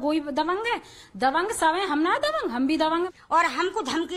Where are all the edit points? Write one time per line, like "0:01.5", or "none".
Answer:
0:01.7
0:03.1